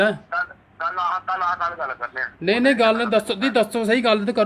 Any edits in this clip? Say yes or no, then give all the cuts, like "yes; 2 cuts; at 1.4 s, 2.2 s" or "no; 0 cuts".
no; 0 cuts